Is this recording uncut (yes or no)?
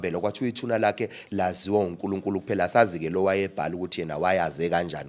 yes